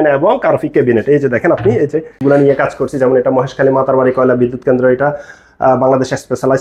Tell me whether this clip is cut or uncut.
cut